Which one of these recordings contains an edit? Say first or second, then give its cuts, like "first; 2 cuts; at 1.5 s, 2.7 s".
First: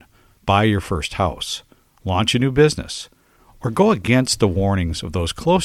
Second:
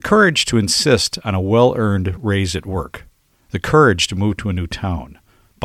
second; 1 cut; at 2.2 s